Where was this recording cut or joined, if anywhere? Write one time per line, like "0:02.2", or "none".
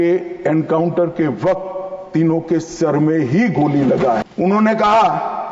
0:04.2